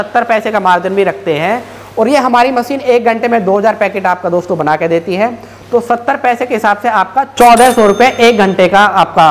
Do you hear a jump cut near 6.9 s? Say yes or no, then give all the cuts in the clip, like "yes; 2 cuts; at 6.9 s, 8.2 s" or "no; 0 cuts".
no; 0 cuts